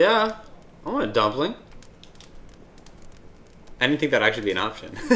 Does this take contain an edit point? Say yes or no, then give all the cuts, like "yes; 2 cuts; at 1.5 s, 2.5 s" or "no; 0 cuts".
yes; 1 cut; at 3.8 s